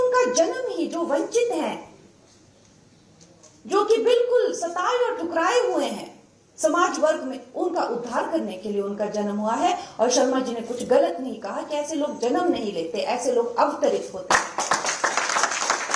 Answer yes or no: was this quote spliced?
no